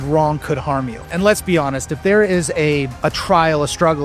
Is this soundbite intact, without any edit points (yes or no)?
no